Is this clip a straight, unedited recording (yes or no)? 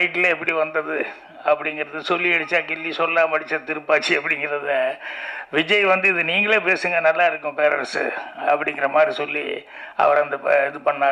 yes